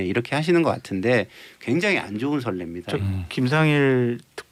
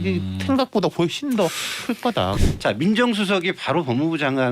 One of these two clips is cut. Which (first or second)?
second